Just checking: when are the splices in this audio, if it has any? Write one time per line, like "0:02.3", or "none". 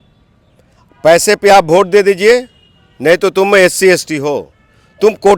none